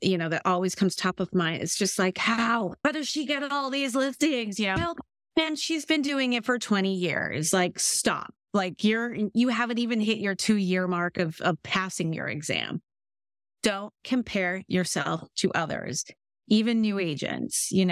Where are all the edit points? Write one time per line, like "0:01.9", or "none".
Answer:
0:02.8

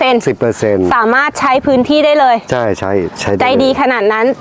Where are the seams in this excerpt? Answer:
none

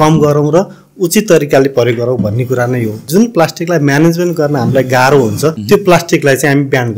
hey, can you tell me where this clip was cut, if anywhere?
0:03.1
0:05.6

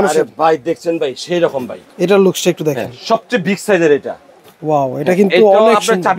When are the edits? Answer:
0:01.8

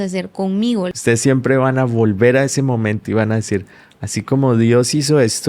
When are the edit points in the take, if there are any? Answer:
0:00.9

